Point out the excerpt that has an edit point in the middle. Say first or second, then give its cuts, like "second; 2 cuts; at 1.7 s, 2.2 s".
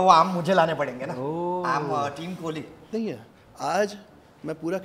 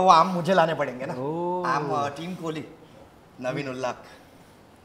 first; 1 cut; at 2.9 s